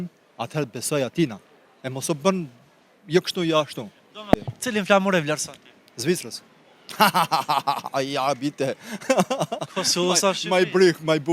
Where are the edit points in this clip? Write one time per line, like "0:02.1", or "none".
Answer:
0:04.5